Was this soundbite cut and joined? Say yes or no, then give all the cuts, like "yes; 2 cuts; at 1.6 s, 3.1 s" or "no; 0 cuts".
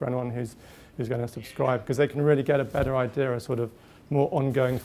no; 0 cuts